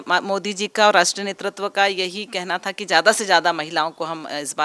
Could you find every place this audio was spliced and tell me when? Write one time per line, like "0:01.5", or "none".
none